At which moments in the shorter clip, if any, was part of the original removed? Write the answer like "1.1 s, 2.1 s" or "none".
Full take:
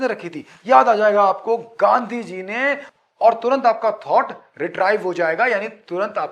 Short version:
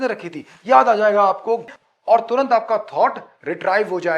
1.7 s